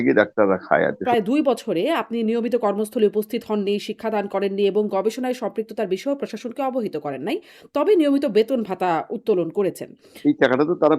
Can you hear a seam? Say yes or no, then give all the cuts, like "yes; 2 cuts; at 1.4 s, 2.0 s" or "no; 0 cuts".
yes; 2 cuts; at 1.0 s, 10.0 s